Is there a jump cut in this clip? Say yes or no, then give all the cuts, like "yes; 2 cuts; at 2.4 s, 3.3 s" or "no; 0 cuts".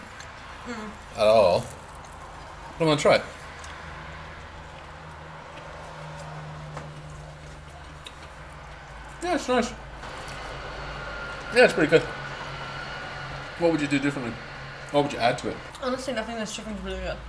yes; 3 cuts; at 10.0 s, 13.5 s, 15.7 s